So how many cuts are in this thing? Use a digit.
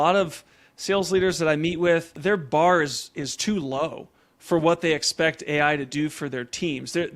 1